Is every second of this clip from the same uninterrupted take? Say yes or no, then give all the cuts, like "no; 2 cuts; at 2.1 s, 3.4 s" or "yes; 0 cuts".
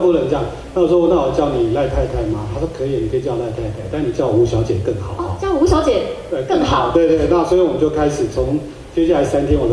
yes; 0 cuts